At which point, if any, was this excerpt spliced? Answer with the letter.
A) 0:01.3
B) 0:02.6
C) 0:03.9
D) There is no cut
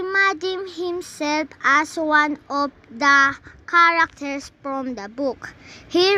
A